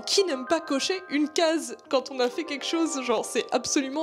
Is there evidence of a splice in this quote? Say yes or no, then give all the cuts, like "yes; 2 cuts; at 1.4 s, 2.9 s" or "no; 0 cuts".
no; 0 cuts